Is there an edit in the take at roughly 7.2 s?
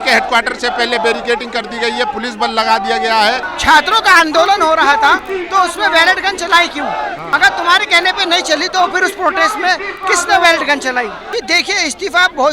yes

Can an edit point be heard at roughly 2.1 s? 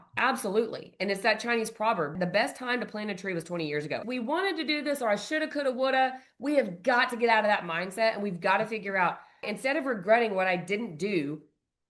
yes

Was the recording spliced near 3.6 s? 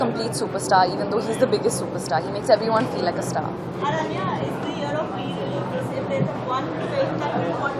no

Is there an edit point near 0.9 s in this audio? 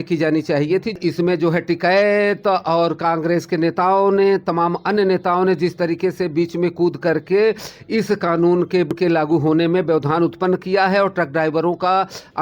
yes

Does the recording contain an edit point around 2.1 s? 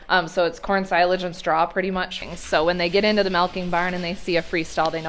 yes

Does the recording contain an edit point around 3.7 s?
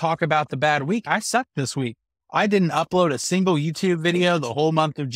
no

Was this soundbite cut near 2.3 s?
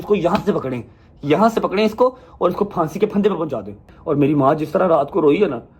no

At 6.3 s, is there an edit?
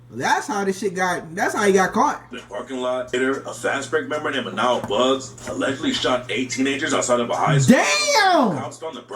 no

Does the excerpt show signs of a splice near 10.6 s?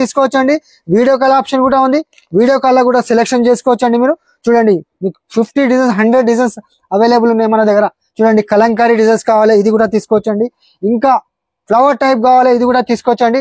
no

